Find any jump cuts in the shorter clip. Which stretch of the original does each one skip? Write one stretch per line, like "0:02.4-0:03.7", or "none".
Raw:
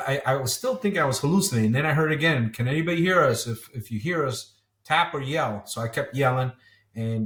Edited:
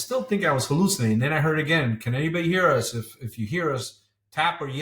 none